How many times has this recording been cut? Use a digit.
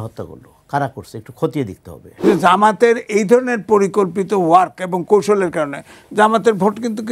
1